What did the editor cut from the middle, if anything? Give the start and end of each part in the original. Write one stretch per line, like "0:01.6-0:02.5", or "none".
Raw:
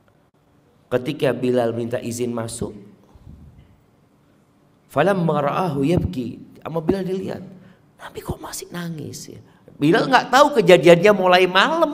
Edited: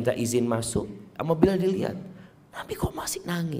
0:02.9-0:06.5